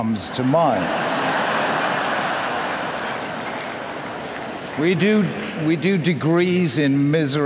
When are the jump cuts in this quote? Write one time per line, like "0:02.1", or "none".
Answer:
none